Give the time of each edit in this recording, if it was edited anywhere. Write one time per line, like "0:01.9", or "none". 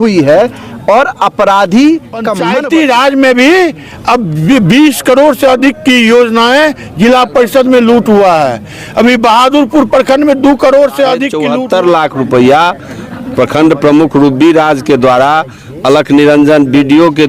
0:02.4
0:11.4